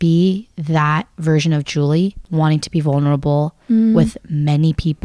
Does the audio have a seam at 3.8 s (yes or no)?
no